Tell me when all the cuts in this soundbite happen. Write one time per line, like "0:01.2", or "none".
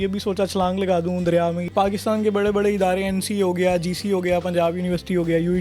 0:01.6